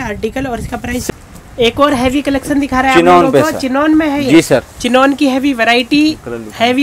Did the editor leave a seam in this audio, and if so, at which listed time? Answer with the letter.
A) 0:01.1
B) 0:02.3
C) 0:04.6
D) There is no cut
A